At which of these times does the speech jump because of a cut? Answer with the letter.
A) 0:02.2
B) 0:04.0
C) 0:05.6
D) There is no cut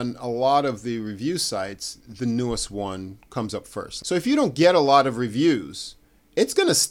B